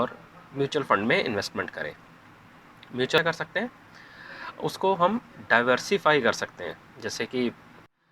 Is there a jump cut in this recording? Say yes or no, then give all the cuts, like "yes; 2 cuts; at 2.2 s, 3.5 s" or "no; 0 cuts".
yes; 1 cut; at 3.2 s